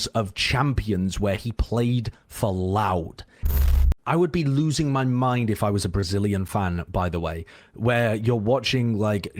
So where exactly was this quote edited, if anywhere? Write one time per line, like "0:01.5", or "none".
0:03.6